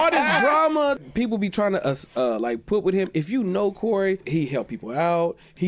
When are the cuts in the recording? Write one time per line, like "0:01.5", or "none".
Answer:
0:01.0
0:04.2